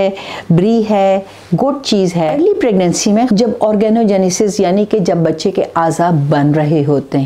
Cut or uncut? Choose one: cut